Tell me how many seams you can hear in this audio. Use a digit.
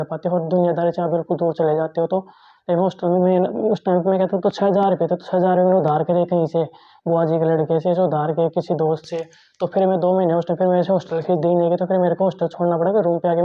0